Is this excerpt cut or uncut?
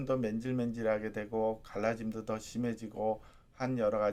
uncut